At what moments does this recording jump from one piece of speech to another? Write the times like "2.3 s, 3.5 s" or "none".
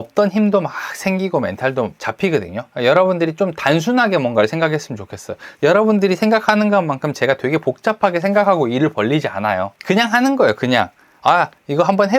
2.3 s, 9.8 s